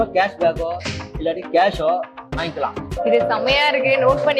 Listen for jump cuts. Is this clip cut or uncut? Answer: cut